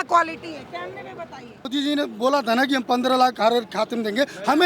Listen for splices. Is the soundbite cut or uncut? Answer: cut